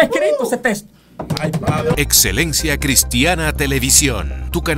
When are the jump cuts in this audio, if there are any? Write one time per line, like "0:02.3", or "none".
0:01.9